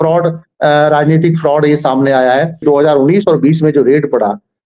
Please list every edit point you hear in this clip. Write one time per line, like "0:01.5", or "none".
0:02.6